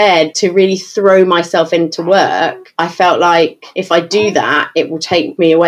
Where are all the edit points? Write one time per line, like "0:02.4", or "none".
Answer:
0:02.6
0:03.7